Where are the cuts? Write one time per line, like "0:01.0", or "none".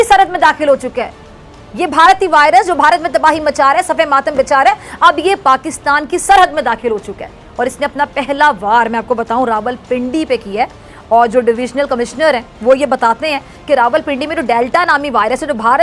none